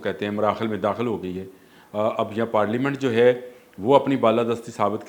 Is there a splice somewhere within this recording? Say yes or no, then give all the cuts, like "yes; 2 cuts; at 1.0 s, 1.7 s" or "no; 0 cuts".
no; 0 cuts